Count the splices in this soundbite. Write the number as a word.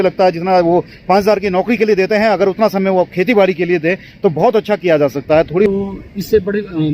one